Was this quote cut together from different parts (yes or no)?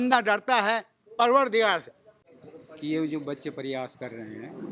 no